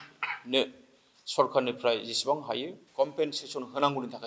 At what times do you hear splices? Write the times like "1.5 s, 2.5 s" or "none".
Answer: 2.8 s